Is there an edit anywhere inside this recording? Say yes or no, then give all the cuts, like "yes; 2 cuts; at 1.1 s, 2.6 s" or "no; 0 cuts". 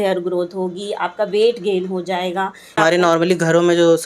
yes; 1 cut; at 2.8 s